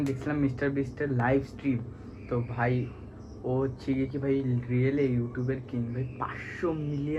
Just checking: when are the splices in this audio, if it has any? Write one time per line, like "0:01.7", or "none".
none